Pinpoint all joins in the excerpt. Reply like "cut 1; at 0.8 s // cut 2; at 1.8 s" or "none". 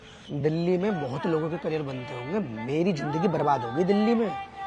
none